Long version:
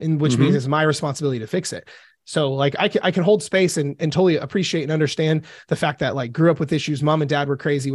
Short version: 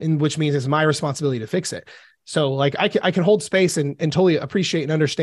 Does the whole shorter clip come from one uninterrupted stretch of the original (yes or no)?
yes